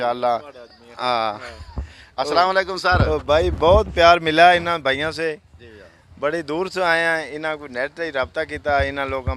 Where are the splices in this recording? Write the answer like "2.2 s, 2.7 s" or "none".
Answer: none